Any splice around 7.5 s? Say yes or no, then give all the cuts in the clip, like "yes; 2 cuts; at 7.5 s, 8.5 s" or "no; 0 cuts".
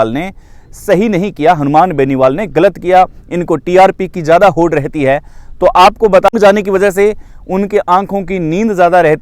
no; 1 cut; at 6.3 s